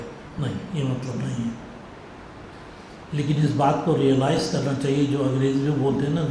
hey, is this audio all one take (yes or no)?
yes